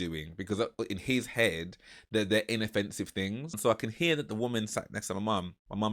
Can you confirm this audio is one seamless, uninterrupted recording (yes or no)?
no